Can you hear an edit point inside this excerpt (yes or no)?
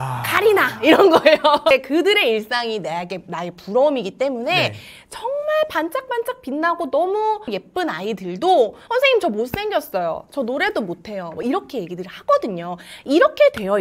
no